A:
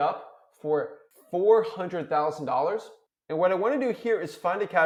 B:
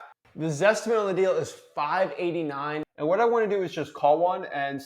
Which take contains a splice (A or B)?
B